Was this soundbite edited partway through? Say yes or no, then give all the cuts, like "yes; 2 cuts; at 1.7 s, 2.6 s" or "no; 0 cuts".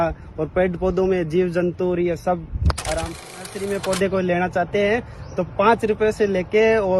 yes; 1 cut; at 3.3 s